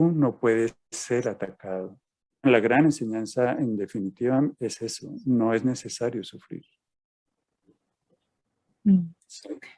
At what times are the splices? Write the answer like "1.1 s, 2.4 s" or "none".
2.5 s